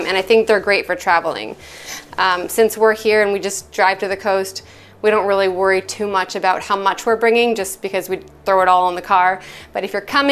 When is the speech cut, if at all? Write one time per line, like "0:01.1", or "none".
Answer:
none